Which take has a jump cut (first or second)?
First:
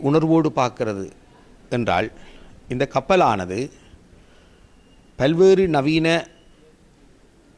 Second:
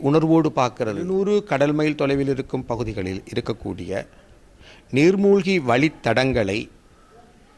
second